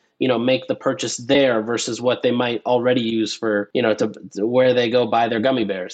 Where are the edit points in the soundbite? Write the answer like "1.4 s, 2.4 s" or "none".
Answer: 3.7 s